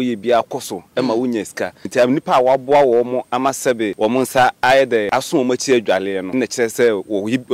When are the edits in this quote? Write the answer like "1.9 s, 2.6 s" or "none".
1.8 s, 3.9 s, 5.1 s, 6.3 s